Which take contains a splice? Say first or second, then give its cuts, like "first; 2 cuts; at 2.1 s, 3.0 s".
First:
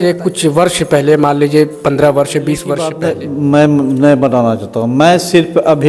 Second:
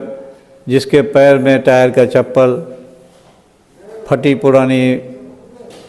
first; 1 cut; at 2.9 s